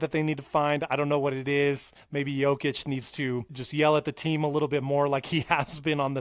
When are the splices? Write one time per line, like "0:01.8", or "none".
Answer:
0:01.9
0:03.6